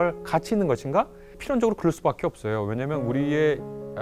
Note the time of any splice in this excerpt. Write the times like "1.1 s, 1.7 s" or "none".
1.3 s